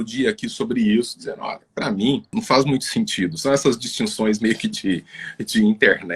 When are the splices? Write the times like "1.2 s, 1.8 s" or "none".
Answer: 2.3 s